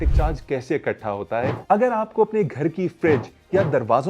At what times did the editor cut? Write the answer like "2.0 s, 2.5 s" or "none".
1.6 s